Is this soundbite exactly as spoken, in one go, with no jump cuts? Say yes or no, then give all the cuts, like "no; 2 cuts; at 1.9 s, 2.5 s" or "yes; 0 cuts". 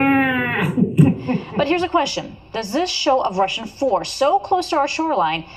no; 1 cut; at 1.5 s